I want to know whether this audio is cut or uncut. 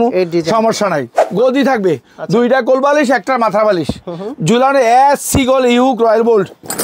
cut